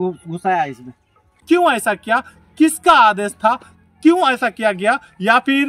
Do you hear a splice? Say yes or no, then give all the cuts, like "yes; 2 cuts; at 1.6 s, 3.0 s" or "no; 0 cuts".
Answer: yes; 1 cut; at 1.3 s